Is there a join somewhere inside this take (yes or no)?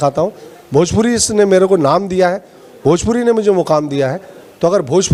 no